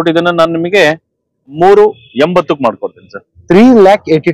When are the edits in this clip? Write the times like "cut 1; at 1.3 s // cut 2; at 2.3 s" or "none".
cut 1; at 1.5 s

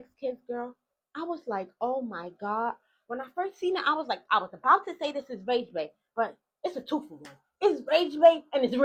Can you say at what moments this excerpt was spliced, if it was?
none

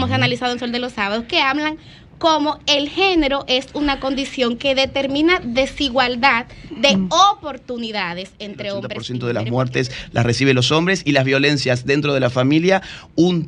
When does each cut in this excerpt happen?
cut 1; at 9.0 s

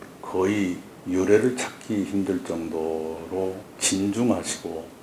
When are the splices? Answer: cut 1; at 0.9 s // cut 2; at 3.7 s

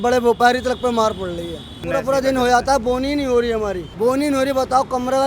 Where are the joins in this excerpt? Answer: cut 1; at 1.8 s // cut 2; at 3.9 s

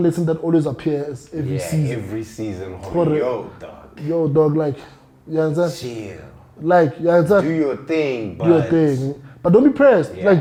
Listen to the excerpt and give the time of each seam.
none

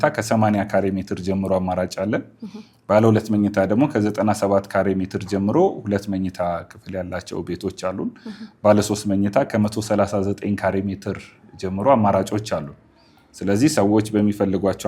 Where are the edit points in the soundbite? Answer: none

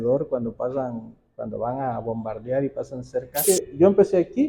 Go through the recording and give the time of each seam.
cut 1; at 3.4 s

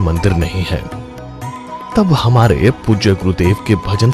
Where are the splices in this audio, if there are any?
cut 1; at 3.0 s

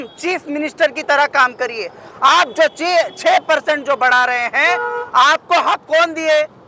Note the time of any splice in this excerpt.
none

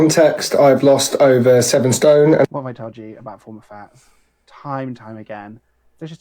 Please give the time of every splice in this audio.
cut 1; at 1.4 s // cut 2; at 3.9 s

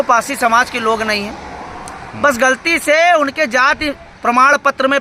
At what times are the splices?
none

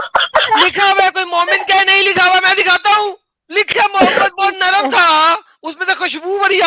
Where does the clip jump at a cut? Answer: cut 1; at 3.7 s

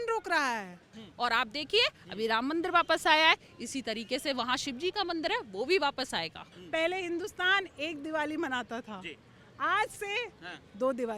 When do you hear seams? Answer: cut 1; at 1.0 s // cut 2; at 6.5 s

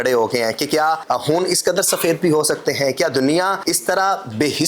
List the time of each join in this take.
cut 1; at 1.0 s // cut 2; at 3.6 s

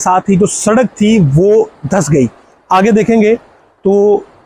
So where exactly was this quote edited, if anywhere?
none

